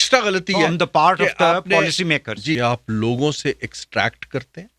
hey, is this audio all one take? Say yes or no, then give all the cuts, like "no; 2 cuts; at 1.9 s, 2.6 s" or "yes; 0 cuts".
no; 1 cut; at 2.6 s